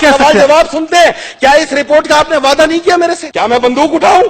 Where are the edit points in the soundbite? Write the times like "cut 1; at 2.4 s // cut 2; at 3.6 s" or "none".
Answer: cut 1; at 3.3 s